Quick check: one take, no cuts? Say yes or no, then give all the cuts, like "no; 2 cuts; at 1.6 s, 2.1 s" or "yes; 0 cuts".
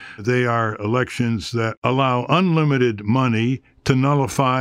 no; 1 cut; at 1.8 s